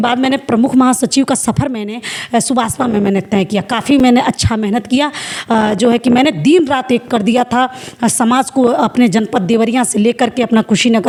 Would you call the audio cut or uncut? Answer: uncut